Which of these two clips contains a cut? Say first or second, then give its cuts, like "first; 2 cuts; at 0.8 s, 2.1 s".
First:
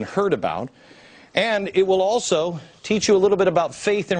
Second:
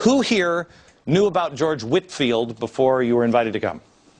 second; 1 cut; at 2.6 s